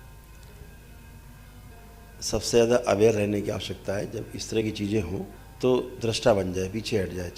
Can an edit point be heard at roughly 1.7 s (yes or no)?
yes